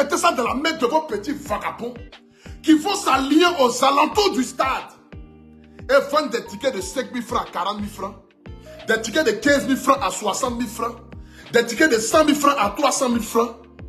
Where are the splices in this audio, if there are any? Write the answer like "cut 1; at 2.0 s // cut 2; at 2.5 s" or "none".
none